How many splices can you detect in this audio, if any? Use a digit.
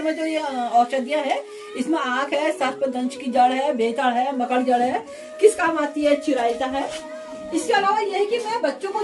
0